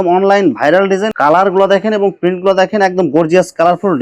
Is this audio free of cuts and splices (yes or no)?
no